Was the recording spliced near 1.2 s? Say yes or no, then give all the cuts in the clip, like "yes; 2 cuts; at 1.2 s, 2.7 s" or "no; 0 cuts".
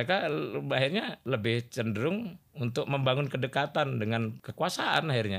yes; 2 cuts; at 1.2 s, 4.4 s